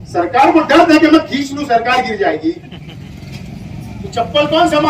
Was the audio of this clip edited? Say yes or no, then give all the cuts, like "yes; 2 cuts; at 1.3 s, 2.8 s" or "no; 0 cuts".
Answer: yes; 1 cut; at 2.8 s